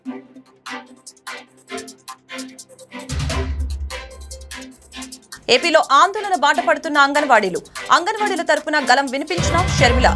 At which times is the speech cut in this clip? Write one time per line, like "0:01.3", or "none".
none